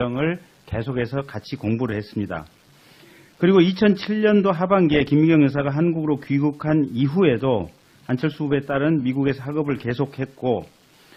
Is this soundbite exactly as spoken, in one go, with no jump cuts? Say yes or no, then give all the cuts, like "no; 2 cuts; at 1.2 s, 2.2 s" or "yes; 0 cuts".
yes; 0 cuts